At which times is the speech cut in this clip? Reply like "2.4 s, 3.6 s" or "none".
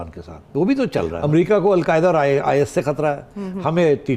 1.2 s